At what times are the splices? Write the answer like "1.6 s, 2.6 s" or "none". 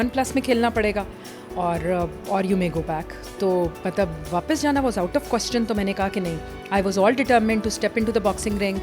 none